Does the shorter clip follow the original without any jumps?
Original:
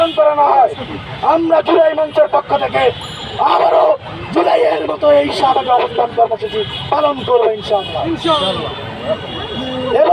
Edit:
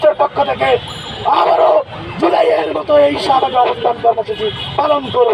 yes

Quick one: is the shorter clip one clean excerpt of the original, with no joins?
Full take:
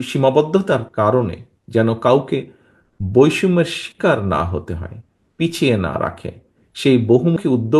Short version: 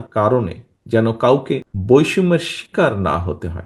no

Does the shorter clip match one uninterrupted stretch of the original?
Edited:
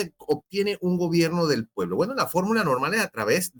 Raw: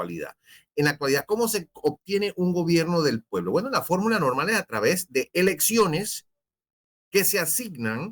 yes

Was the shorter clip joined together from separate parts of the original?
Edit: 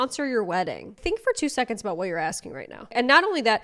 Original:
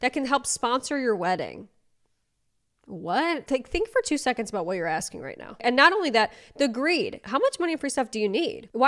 yes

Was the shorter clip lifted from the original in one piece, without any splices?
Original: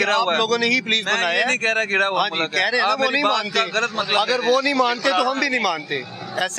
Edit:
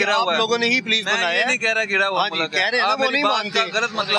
yes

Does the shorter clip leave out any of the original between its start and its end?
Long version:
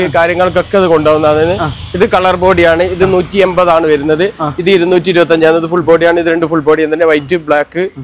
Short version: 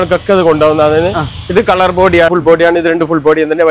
yes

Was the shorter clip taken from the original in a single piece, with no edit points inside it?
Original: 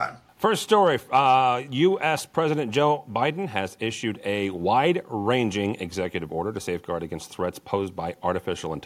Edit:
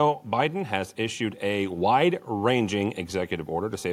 yes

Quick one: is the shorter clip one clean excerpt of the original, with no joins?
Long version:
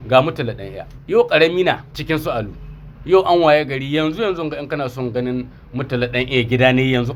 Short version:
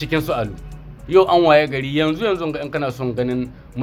yes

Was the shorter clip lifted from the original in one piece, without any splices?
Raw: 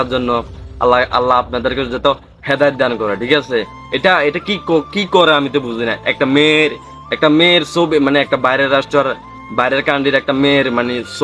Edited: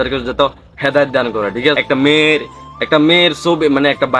no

